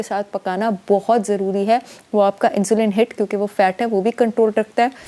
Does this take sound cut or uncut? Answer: uncut